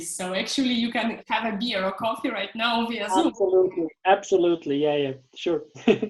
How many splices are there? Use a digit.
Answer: 0